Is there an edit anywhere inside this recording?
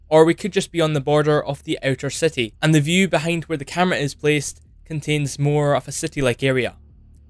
yes; 1 cut; at 5.7 s

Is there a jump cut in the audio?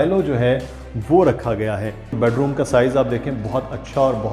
yes; 1 cut; at 2.2 s

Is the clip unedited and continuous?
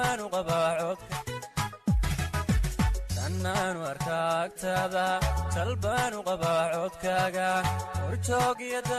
no; 1 cut; at 1.0 s

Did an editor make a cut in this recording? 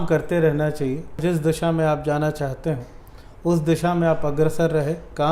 yes; 1 cut; at 1.2 s

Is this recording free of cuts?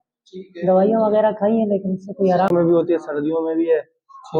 no; 1 cut; at 2.5 s

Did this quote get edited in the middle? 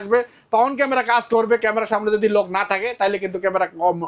no; 0 cuts

